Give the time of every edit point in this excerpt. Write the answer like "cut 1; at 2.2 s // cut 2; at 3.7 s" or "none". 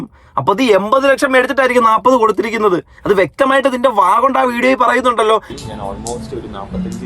cut 1; at 5.6 s